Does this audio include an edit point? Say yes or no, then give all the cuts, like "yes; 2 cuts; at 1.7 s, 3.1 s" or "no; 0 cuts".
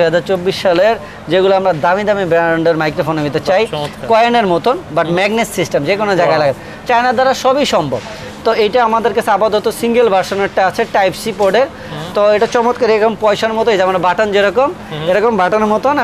no; 0 cuts